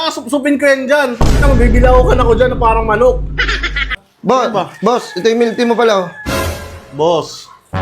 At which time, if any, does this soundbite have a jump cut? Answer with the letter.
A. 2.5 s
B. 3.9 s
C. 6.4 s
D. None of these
B